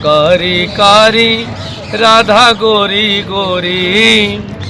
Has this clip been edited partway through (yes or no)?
no